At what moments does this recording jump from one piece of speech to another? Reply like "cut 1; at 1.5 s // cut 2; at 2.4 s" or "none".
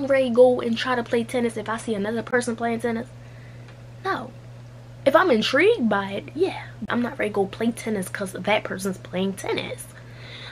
cut 1; at 6.8 s